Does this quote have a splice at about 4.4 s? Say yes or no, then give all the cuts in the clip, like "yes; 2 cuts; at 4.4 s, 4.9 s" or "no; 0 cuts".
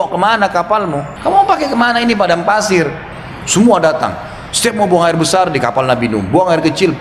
no; 2 cuts; at 1.1 s, 3.1 s